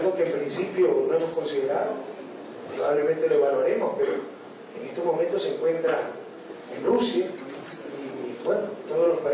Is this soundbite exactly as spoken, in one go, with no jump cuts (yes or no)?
no